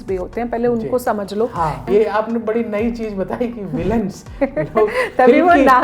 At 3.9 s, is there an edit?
no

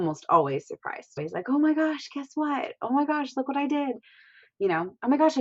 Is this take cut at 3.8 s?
no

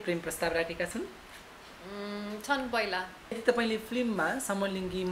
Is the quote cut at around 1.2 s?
no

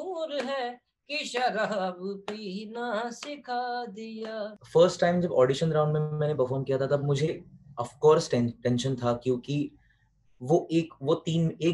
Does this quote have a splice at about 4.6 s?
yes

